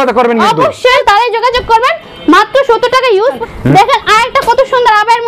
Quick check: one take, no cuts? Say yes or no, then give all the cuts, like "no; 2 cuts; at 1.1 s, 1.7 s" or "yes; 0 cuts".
no; 2 cuts; at 1.0 s, 3.4 s